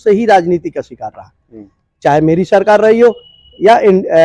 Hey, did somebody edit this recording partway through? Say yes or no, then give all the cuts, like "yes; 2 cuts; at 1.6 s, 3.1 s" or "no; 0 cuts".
no; 0 cuts